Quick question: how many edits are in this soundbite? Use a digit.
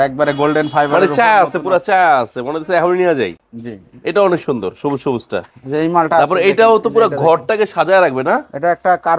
0